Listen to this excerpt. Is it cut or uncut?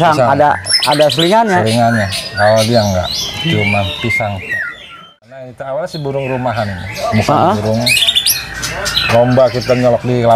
cut